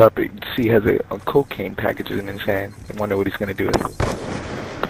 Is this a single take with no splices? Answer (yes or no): yes